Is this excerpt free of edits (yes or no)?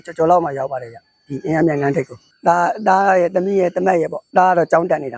no